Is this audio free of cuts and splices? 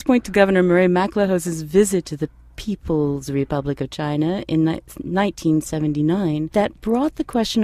yes; 0 cuts

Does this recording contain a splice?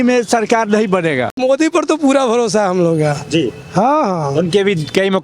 yes; 1 cut; at 1.4 s

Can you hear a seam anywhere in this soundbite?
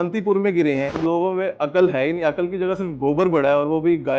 yes; 1 cut; at 1.0 s

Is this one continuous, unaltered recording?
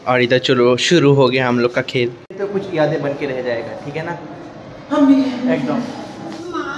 no; 1 cut; at 2.2 s

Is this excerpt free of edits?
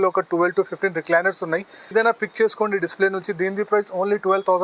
no; 1 cut; at 1.9 s

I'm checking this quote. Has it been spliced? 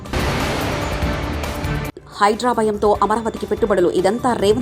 no; 0 cuts

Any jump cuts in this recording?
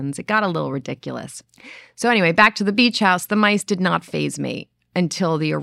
no; 0 cuts

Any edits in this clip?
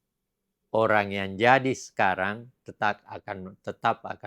no; 0 cuts

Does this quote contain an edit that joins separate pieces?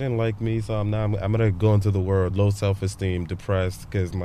yes; 1 cut; at 2.3 s

